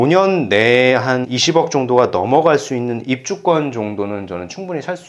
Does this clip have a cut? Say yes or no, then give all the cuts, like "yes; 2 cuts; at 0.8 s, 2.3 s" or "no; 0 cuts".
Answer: yes; 1 cut; at 1.3 s